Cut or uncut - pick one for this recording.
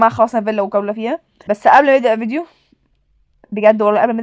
cut